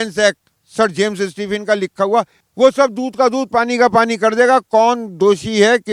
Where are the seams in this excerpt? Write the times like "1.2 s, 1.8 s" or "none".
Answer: none

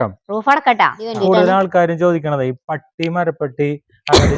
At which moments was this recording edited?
1.1 s

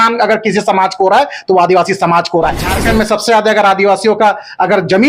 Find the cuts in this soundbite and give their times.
2.7 s

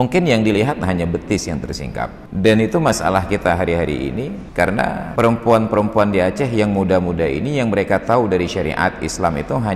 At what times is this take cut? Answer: 2.2 s, 4.4 s, 5.1 s

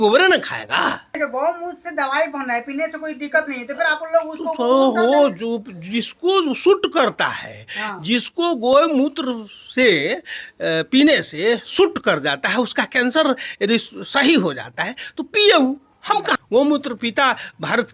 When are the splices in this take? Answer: 1.2 s, 16.0 s

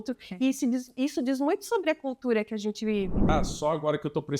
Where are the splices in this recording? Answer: 3.3 s

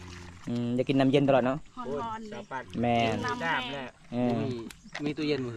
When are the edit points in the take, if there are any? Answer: none

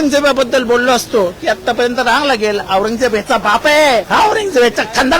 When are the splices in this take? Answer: 1.4 s, 4.1 s

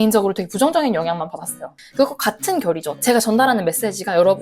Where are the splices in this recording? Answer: 1.8 s, 3.0 s

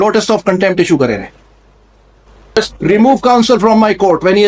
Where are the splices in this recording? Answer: 2.6 s

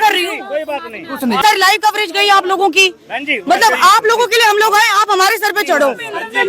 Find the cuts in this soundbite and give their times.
1.4 s

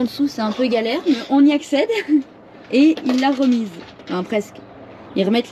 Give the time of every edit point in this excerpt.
none

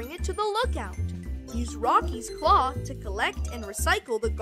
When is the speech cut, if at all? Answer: none

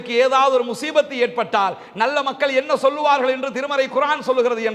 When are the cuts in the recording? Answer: none

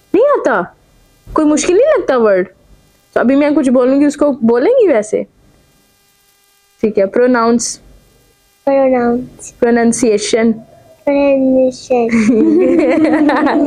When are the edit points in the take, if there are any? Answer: none

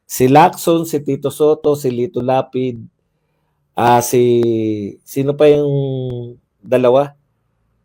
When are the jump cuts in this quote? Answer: none

